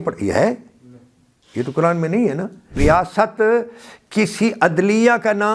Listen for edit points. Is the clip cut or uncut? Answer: cut